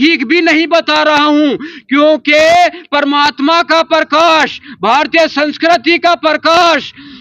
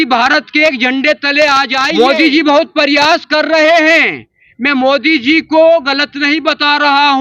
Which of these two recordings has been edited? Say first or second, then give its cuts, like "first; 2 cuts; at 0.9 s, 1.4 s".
second; 1 cut; at 1.9 s